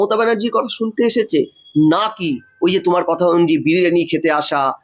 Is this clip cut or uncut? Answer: uncut